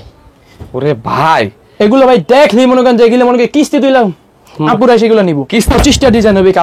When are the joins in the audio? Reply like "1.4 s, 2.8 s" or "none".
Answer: 5.7 s